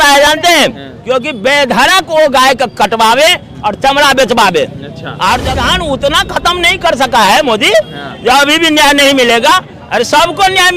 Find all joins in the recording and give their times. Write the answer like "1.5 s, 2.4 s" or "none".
5.4 s